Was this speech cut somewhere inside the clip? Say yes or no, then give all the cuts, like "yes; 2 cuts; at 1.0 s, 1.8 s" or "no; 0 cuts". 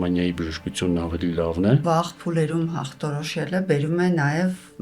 yes; 1 cut; at 1.8 s